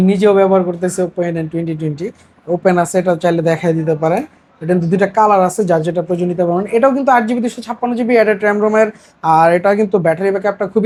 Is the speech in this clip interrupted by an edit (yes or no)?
no